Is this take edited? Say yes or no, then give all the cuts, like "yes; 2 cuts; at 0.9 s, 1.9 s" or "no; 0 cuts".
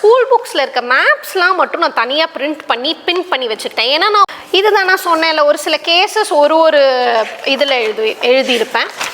yes; 1 cut; at 4.2 s